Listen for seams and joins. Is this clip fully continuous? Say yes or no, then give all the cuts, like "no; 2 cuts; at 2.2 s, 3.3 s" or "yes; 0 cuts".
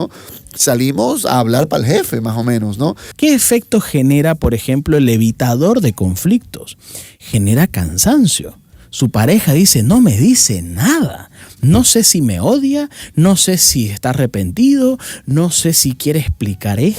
no; 1 cut; at 3.1 s